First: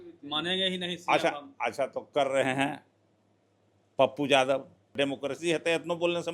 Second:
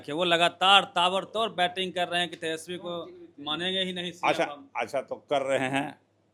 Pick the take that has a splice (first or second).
first